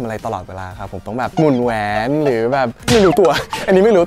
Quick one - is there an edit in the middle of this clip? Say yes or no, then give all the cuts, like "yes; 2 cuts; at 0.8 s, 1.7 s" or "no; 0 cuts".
yes; 1 cut; at 2.8 s